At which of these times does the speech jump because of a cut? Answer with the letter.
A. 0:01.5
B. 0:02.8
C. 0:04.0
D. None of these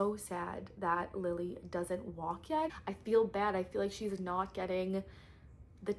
B